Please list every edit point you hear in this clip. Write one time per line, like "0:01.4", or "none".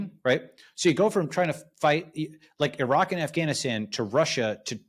none